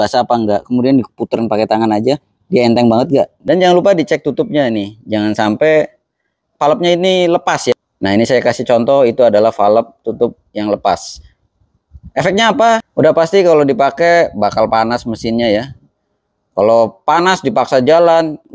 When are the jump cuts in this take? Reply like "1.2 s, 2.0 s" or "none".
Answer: 3.4 s, 7.7 s

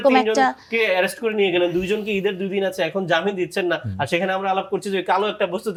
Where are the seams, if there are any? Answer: none

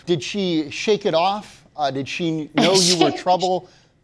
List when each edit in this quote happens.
none

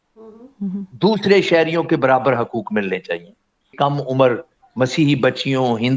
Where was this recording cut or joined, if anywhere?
3.7 s

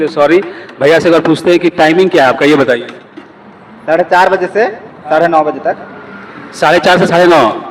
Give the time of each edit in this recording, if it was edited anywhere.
none

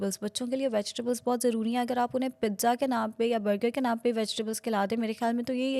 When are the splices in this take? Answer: none

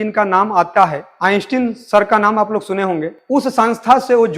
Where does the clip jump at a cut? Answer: 1.1 s

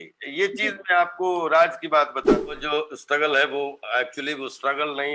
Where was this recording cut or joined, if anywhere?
2.4 s

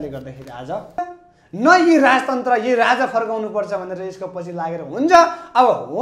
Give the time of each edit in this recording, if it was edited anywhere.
1.0 s

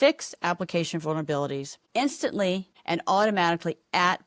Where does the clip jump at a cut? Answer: 1.7 s, 2.7 s

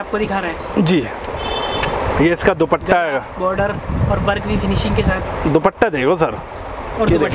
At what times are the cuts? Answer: none

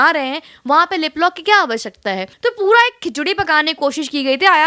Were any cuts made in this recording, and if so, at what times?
2.3 s

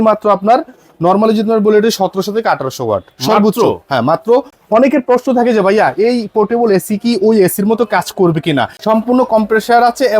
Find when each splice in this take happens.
4.6 s, 8.8 s

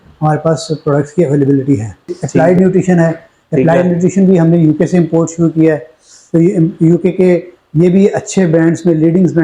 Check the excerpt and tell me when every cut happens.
2.2 s

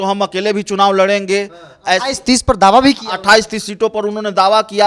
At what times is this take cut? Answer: none

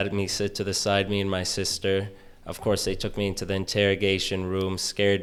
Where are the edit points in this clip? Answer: none

